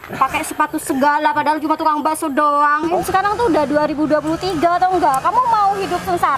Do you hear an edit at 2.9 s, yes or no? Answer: yes